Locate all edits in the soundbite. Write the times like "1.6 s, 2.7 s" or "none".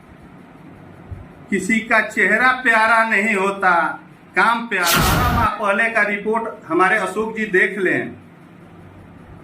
5.1 s

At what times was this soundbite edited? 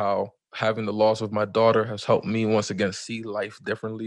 none

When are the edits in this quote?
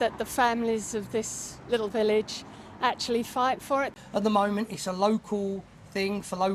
3.9 s

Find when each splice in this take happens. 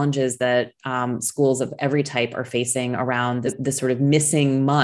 3.5 s

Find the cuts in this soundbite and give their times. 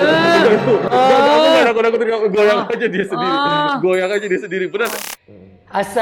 5.0 s

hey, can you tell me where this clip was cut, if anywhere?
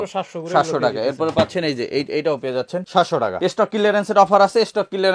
3.0 s

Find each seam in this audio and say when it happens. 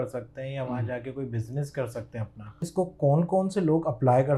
2.6 s

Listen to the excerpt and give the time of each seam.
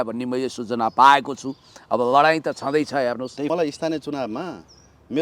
3.5 s

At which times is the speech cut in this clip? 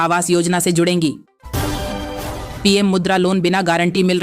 1.3 s, 2.5 s

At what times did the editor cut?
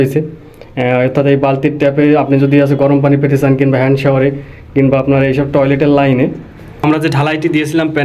6.8 s

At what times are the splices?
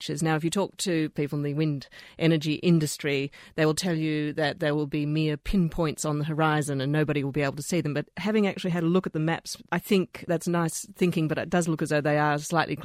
1.1 s, 9.6 s

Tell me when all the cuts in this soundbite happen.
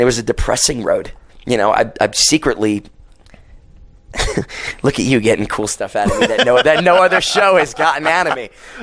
1.2 s

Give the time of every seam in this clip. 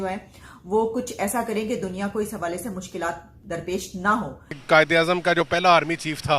4.6 s

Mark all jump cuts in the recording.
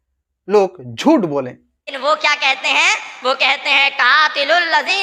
1.9 s

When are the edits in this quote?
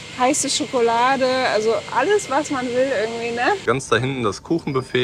3.6 s

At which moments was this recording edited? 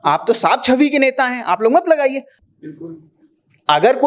2.3 s

